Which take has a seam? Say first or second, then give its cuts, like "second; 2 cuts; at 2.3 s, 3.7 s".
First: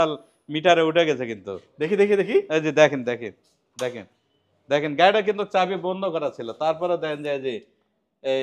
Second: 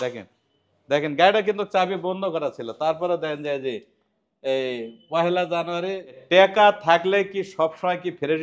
second; 1 cut; at 6.2 s